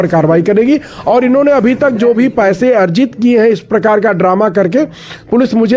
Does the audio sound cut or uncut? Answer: uncut